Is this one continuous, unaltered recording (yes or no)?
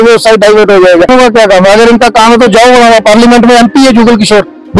no